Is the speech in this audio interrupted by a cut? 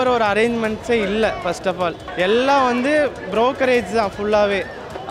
yes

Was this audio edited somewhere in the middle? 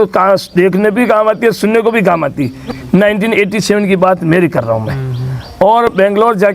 no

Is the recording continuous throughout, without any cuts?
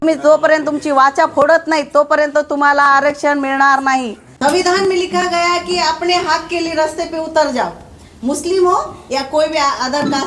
no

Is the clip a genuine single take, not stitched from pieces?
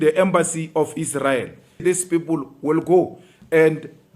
no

